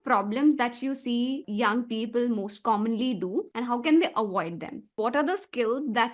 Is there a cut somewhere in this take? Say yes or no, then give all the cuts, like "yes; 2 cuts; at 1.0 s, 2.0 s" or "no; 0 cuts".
yes; 3 cuts; at 1.4 s, 3.5 s, 5.0 s